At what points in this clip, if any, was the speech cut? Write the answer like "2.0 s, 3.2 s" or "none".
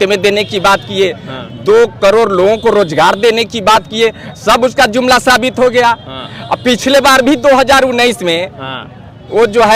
none